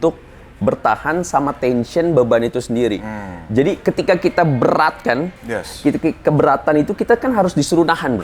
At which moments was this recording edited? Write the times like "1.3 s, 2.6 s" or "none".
none